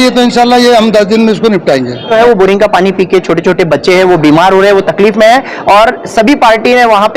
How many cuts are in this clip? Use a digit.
1